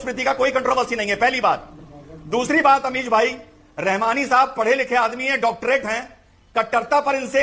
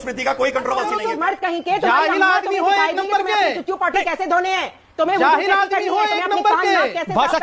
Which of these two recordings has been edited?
second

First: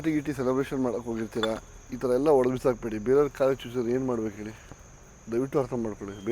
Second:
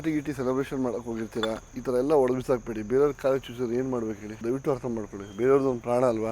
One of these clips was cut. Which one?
second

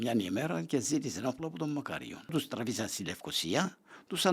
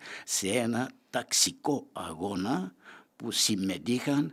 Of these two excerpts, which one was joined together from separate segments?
first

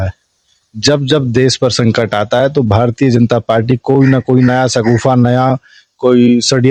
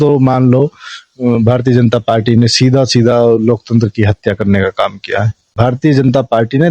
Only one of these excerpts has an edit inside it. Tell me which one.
second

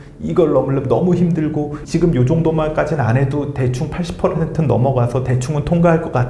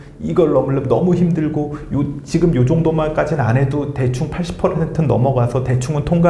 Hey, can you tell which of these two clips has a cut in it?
first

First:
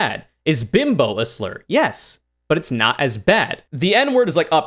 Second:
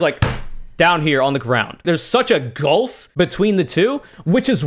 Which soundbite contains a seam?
first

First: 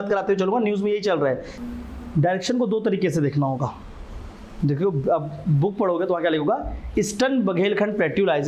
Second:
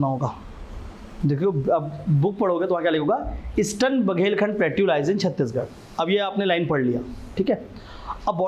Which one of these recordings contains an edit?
first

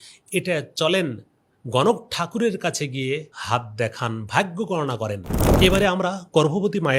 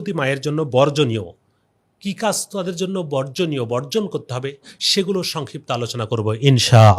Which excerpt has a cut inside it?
first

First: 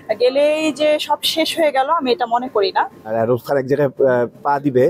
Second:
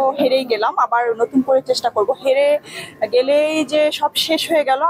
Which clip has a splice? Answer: first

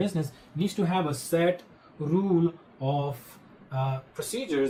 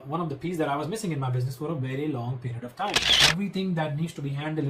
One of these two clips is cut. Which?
second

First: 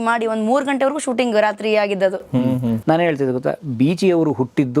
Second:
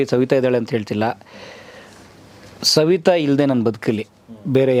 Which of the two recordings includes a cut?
first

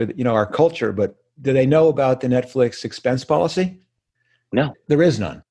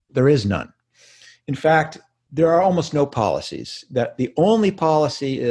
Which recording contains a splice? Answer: first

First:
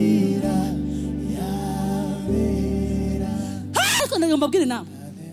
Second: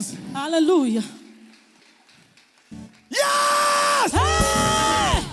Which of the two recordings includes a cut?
first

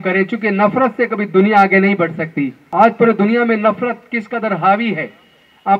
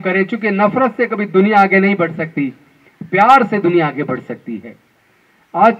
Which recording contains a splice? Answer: first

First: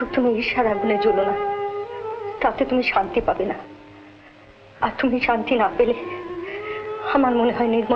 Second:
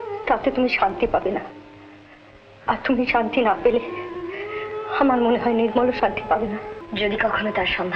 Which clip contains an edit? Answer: second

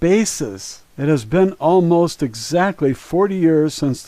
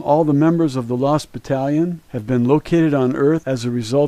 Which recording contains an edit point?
first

